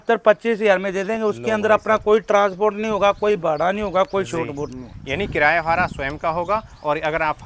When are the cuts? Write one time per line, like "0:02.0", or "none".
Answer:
none